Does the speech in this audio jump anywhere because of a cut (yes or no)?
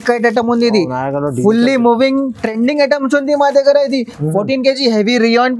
no